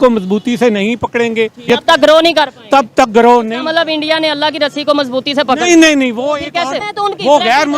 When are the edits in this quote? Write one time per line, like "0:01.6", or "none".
0:01.6